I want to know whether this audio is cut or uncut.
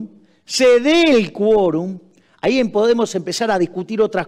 uncut